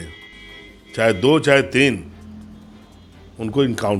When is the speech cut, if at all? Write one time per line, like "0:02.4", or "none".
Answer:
none